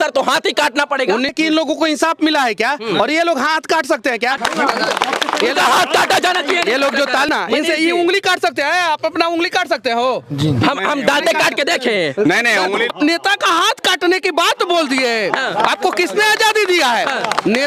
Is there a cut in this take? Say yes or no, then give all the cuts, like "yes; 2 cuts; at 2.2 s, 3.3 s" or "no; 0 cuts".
yes; 4 cuts; at 1.3 s, 4.4 s, 7.3 s, 12.9 s